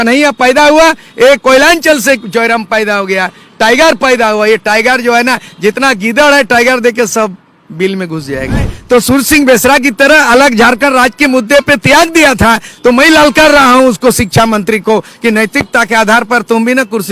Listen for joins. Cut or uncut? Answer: cut